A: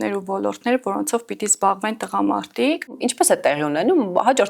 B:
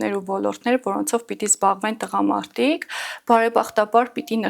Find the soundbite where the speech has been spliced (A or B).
A